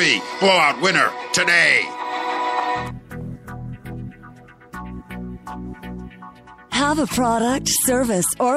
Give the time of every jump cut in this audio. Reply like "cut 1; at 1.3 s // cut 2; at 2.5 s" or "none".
cut 1; at 2.8 s